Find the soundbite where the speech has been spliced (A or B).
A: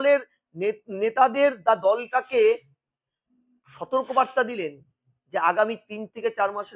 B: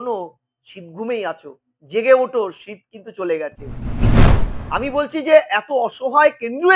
B